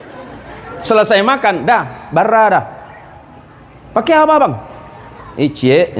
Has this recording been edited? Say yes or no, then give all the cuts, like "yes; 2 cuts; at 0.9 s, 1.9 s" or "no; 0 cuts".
no; 0 cuts